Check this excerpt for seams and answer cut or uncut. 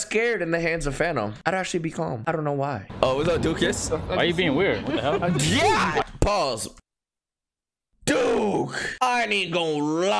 cut